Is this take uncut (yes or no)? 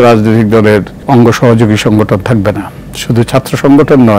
no